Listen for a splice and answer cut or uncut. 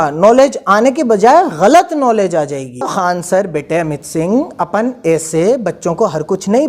cut